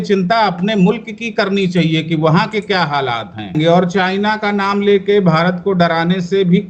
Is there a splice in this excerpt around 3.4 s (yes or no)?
yes